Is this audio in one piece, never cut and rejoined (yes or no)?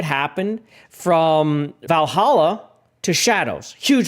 no